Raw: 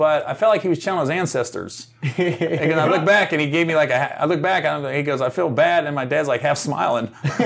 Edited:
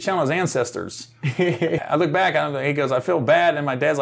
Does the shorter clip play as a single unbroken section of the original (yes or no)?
no